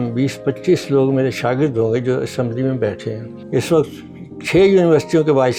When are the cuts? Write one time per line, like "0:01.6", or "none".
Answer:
none